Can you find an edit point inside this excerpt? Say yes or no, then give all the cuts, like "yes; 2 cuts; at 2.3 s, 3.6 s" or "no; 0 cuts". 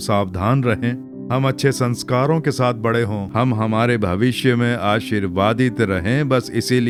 no; 0 cuts